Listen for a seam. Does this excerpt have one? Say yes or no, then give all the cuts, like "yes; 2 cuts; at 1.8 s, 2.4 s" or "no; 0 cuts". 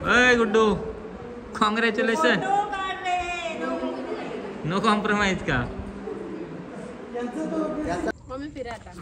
yes; 1 cut; at 8.1 s